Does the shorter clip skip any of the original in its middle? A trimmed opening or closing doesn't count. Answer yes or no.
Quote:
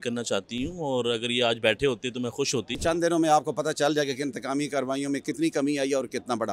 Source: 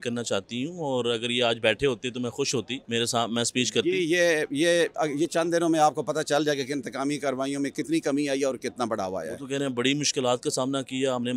yes